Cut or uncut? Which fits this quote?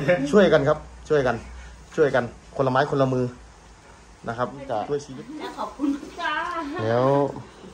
cut